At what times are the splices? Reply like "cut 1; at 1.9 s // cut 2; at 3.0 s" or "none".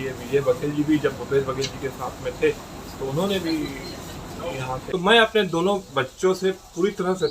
cut 1; at 4.7 s